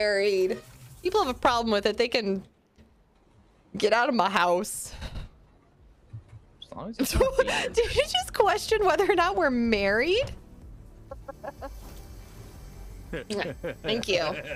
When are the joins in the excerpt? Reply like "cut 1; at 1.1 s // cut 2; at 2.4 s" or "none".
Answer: none